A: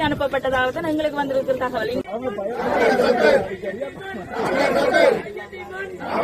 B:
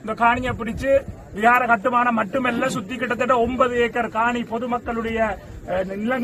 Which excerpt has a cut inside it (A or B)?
A